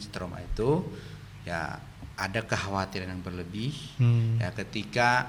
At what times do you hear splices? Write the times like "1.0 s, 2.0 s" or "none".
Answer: none